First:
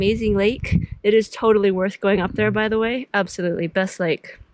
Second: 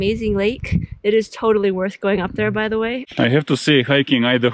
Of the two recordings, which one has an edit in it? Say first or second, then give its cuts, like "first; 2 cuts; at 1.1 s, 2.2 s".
second; 1 cut; at 3.0 s